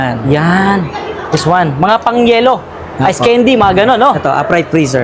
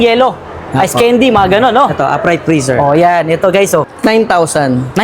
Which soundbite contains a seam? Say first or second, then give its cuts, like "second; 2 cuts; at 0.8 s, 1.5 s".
second; 1 cut; at 3.9 s